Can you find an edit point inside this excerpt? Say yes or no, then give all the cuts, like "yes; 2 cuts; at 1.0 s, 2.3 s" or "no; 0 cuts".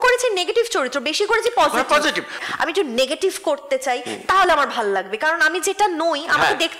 yes; 1 cut; at 2.3 s